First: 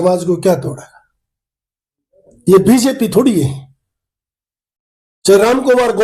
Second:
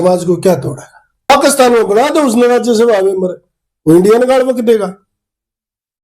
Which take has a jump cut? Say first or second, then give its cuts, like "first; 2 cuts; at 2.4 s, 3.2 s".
second; 1 cut; at 1.3 s